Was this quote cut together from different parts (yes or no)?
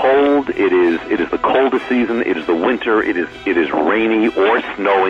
no